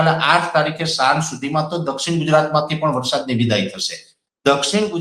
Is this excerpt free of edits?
yes; 0 cuts

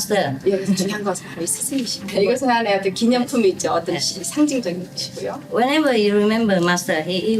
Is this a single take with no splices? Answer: no; 1 cut; at 2.0 s

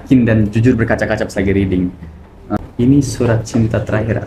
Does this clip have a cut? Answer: yes; 1 cut; at 2.6 s

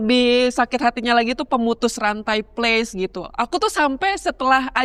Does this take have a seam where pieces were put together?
no; 0 cuts

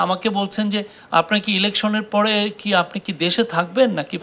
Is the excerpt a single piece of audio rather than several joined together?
yes; 0 cuts

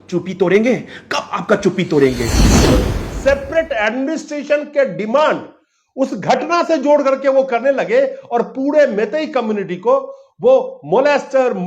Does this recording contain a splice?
yes; 1 cut; at 2.6 s

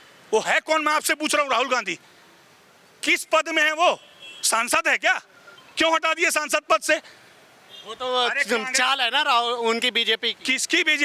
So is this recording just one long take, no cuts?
yes; 0 cuts

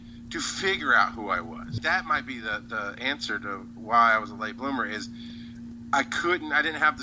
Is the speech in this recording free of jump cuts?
no; 1 cut; at 1.8 s

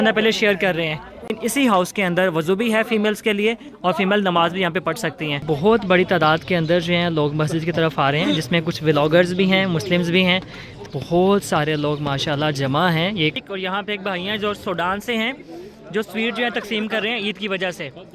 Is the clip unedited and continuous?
no; 4 cuts; at 1.3 s, 5.4 s, 10.8 s, 13.4 s

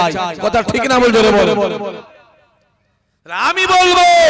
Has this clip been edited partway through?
yes; 1 cut; at 2.0 s

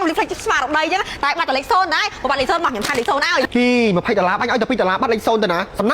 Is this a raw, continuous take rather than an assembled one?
no; 1 cut; at 3.5 s

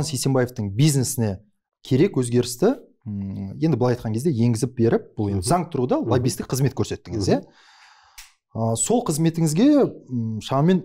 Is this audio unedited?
yes; 0 cuts

